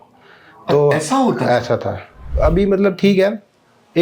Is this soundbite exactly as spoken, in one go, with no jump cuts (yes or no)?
no